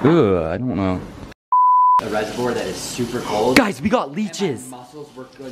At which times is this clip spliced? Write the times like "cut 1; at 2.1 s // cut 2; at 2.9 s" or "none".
cut 1; at 2.1 s